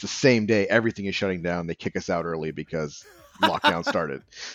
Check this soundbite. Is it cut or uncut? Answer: uncut